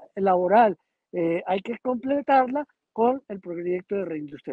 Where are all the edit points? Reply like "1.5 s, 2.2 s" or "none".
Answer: none